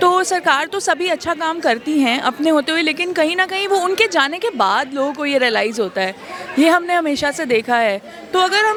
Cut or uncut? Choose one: uncut